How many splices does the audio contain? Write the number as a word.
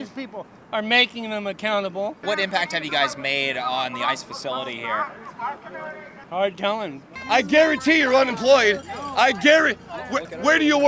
three